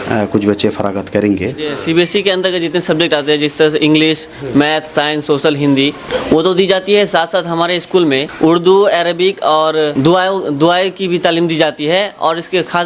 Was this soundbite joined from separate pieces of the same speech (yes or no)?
yes